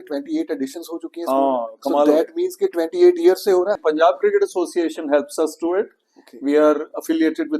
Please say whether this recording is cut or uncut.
cut